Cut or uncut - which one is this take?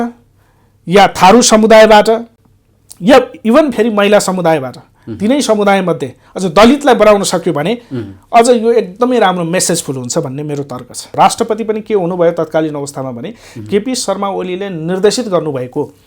cut